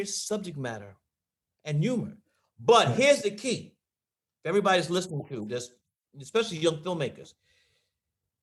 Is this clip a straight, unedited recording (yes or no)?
yes